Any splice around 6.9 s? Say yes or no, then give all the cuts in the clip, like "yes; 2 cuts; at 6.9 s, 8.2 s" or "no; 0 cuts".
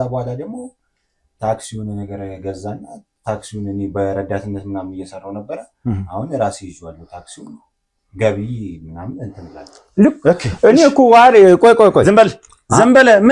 no; 0 cuts